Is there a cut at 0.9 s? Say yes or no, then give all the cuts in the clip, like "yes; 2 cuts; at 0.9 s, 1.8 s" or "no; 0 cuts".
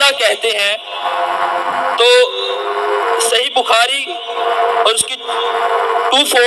no; 0 cuts